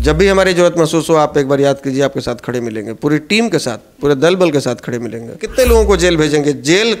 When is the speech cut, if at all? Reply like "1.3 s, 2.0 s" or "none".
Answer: 5.5 s